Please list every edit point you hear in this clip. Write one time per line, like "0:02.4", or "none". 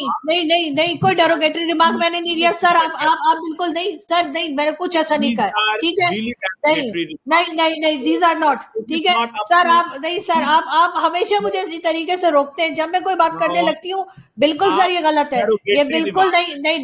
none